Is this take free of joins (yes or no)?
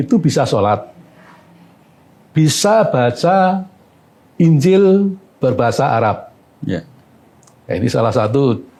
yes